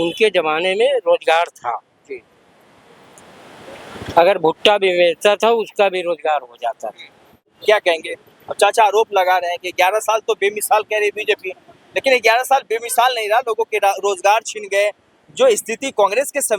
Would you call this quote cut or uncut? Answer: cut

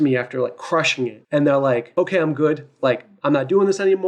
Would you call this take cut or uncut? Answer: cut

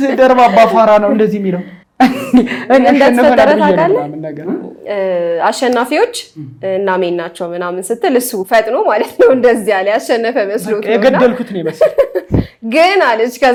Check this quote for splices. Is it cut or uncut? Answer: uncut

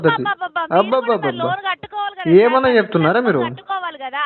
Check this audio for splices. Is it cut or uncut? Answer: uncut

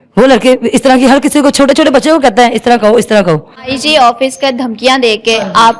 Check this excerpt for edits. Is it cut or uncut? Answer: cut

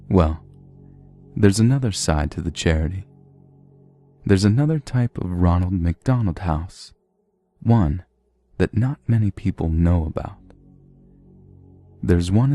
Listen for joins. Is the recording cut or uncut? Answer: uncut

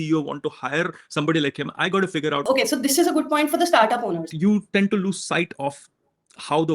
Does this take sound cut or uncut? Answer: cut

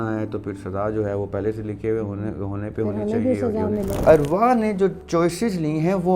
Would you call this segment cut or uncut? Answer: cut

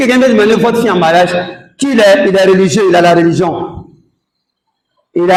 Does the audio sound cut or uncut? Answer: uncut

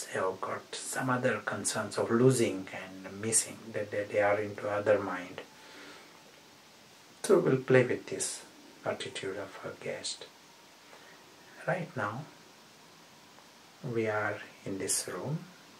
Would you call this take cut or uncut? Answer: uncut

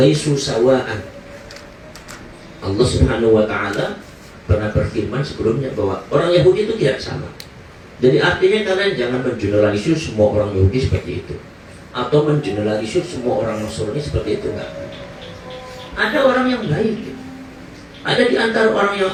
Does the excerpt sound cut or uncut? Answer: uncut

